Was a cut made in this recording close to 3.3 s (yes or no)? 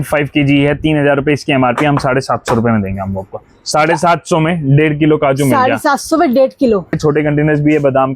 no